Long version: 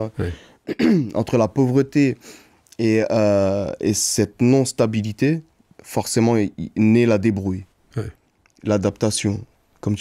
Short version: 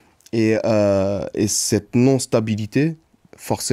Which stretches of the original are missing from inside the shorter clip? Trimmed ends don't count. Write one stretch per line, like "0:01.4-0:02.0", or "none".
none